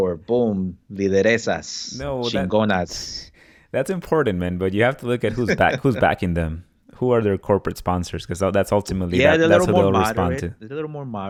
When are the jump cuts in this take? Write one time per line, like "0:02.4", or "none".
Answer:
none